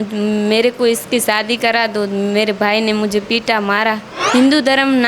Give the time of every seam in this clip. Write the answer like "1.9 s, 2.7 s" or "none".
4.1 s